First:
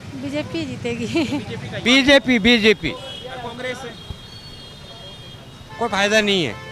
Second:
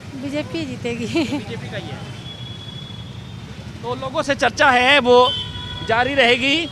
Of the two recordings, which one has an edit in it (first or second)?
first